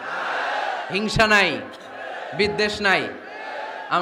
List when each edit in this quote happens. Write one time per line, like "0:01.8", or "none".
none